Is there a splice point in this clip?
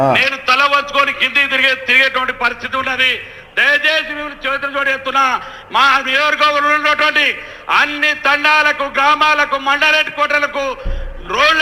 no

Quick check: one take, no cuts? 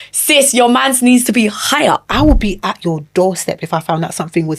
no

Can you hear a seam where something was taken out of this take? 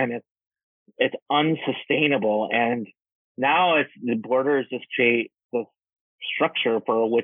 yes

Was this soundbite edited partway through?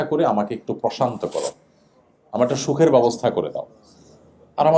no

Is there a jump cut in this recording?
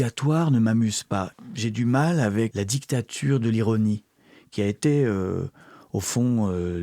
yes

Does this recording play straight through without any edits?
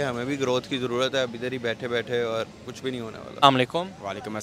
yes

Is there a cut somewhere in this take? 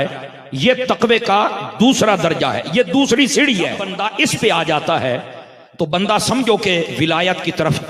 yes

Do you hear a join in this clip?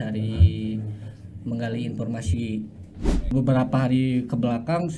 yes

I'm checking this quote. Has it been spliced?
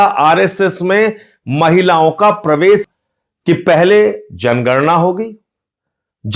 yes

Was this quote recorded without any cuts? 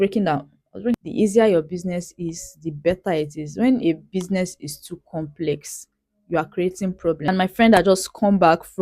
no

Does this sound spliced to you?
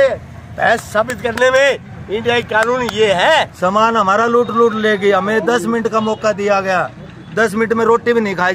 yes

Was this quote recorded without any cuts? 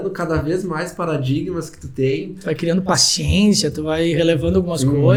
yes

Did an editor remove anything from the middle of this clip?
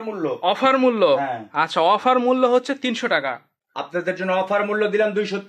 yes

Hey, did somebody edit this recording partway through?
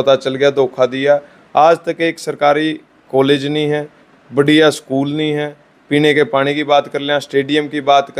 no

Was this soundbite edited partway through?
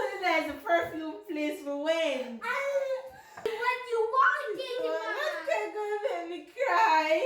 yes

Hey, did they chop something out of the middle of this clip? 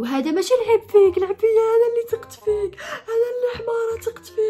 no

